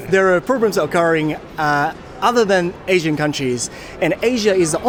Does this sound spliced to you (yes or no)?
no